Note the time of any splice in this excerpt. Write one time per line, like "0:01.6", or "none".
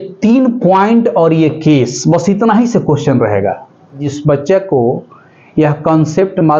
0:04.0